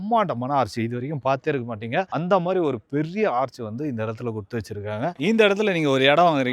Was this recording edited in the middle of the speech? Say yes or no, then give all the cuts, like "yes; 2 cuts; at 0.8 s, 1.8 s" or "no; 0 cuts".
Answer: yes; 1 cut; at 5.2 s